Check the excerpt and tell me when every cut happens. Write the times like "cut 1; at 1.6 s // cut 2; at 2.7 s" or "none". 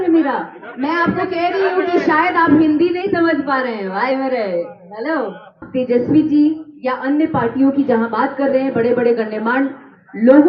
cut 1; at 5.7 s